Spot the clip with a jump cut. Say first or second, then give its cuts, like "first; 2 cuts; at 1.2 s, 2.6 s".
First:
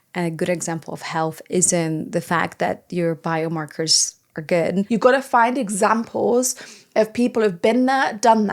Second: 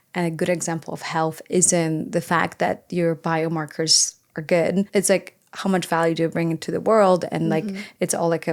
first; 1 cut; at 4.9 s